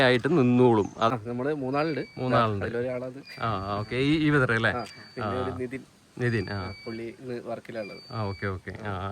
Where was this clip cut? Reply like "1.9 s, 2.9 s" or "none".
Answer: 1.1 s